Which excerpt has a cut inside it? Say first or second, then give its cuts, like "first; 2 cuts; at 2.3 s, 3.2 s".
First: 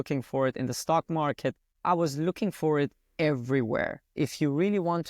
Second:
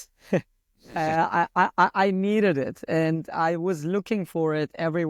first; 2 cuts; at 1.7 s, 4.1 s